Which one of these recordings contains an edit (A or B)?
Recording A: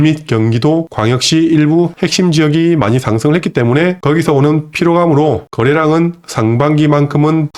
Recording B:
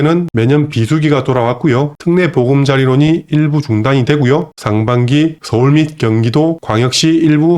B